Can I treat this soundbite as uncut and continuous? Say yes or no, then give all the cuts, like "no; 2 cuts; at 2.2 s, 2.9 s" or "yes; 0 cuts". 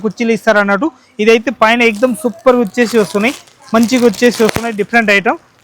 yes; 0 cuts